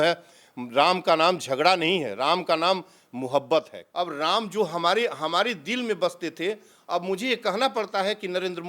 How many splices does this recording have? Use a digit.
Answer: 1